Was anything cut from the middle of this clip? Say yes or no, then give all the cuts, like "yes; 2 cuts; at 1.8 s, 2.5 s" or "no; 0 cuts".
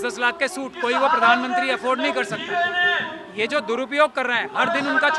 no; 0 cuts